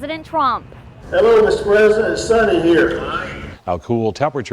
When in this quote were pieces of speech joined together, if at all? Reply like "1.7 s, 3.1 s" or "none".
3.5 s